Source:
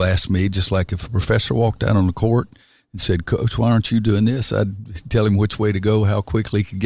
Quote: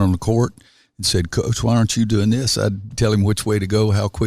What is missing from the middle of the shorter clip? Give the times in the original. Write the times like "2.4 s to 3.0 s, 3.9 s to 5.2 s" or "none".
4.8 s to 5.0 s